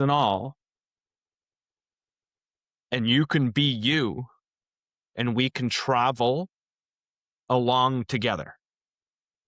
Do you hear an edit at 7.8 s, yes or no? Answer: no